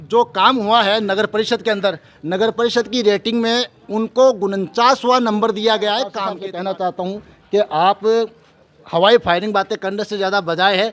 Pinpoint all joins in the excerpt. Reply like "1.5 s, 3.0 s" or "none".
6.2 s

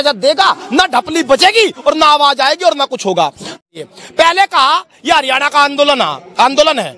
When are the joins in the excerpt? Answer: 3.5 s

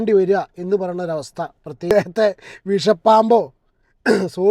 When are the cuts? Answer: 1.9 s

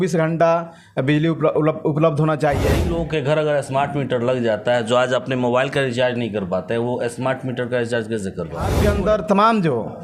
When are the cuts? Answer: 2.8 s, 8.8 s

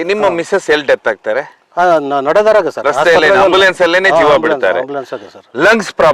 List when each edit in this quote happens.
none

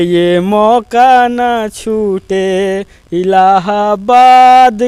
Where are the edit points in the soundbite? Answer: none

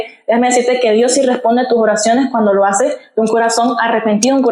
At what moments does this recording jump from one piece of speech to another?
none

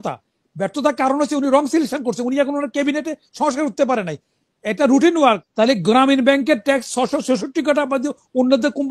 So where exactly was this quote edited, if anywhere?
5.5 s

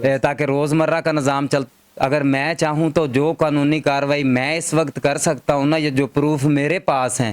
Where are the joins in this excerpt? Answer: 1.6 s

